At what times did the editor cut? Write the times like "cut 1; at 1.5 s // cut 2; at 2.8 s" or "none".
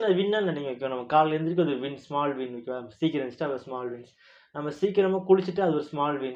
none